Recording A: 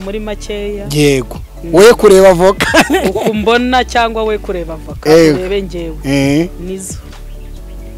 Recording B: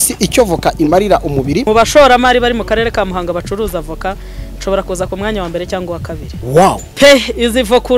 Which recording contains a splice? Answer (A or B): B